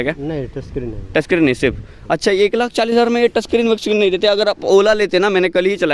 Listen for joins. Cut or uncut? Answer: uncut